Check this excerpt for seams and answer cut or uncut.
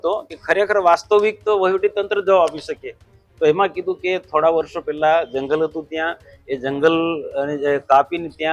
uncut